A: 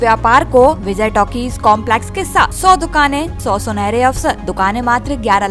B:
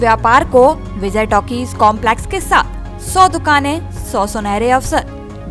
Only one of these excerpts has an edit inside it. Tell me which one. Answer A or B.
A